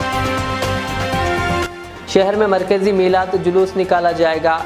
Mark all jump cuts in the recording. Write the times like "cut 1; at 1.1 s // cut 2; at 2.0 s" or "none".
cut 1; at 1.6 s